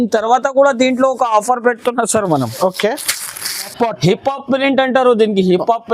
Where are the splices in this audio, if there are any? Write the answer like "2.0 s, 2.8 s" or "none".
3.7 s